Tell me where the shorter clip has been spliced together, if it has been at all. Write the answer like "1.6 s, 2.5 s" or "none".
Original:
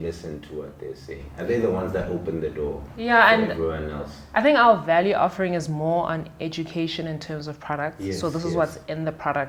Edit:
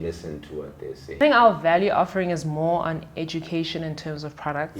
1.2 s